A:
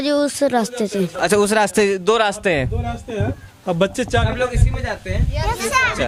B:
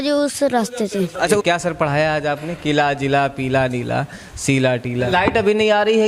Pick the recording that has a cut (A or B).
B